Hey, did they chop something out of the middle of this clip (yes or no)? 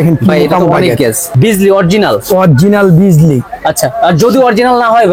yes